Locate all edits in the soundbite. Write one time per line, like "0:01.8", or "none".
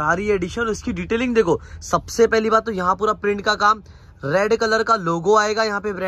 none